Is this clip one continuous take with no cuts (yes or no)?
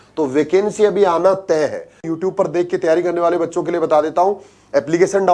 no